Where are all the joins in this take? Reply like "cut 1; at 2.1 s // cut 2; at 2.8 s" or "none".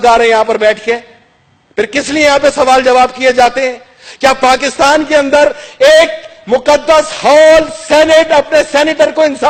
none